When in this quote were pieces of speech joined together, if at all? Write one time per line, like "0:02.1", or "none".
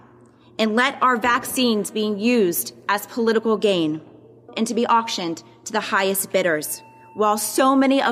0:04.5